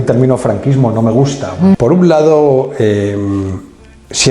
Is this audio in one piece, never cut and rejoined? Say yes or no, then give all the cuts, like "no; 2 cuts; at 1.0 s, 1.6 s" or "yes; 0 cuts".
no; 1 cut; at 1.8 s